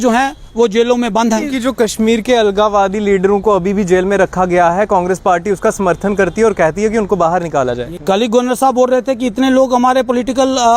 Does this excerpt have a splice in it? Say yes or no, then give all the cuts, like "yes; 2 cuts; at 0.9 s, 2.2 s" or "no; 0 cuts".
yes; 2 cuts; at 1.5 s, 7.9 s